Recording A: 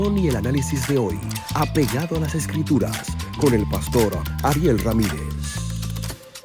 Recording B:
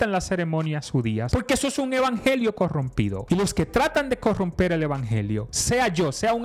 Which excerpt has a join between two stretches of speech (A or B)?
B